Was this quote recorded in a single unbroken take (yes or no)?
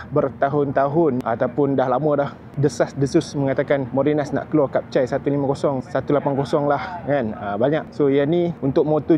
yes